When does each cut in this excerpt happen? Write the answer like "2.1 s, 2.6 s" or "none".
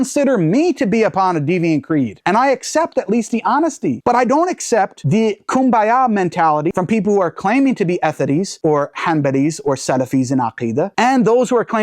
none